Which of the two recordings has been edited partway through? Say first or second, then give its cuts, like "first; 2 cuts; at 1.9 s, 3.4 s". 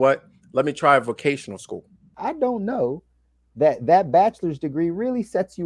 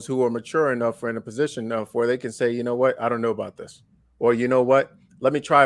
first; 1 cut; at 2.1 s